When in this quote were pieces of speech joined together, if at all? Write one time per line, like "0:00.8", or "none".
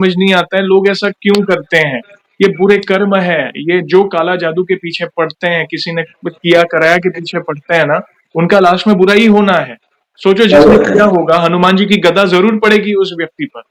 none